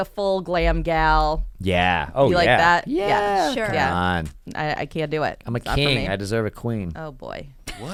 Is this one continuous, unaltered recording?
yes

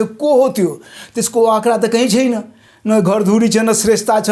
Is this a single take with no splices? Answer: yes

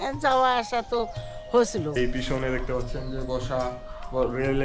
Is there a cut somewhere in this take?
yes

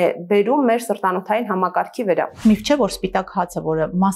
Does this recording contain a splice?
yes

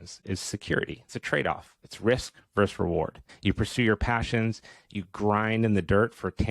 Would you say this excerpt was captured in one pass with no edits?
no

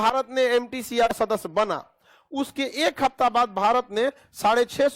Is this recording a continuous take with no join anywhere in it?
no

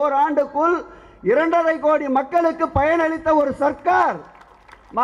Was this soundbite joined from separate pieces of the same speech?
no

